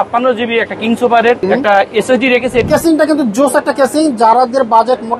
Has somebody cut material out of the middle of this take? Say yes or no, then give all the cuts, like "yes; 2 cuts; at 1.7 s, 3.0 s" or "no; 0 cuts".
yes; 2 cuts; at 1.4 s, 2.7 s